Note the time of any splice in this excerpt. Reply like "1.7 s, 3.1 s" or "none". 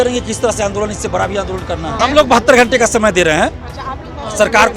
2.0 s